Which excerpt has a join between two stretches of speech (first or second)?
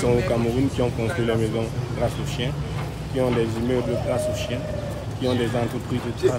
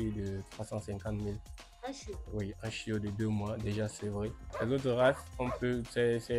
second